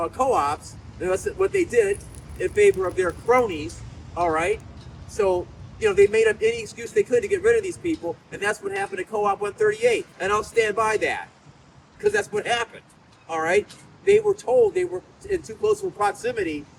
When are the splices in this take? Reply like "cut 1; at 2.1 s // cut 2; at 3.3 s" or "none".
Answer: none